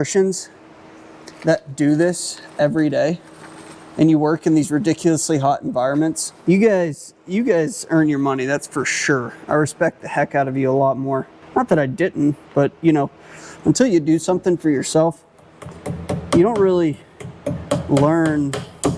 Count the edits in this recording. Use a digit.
2